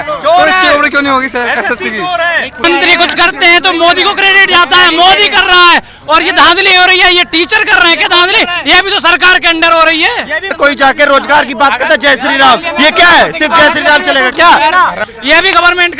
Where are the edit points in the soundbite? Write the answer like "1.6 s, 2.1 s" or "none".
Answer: 2.6 s, 10.5 s, 15.0 s